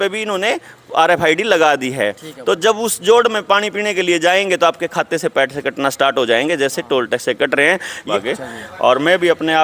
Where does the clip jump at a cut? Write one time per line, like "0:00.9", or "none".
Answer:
0:08.1

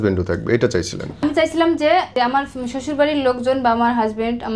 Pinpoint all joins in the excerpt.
0:01.2
0:02.1

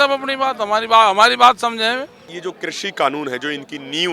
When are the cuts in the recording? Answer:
0:02.3

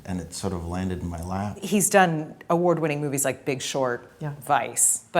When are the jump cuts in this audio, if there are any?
0:01.6

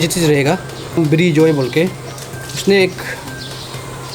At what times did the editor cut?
0:01.0

